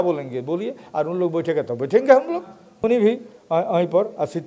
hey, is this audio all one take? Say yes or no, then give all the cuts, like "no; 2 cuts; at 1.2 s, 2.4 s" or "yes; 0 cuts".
no; 1 cut; at 2.8 s